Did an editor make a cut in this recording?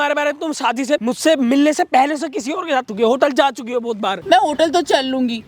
yes; 3 cuts; at 1.0 s, 2.9 s, 4.2 s

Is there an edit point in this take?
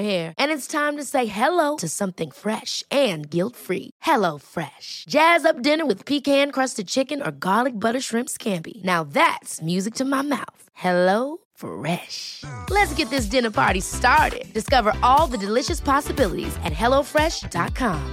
no; 0 cuts

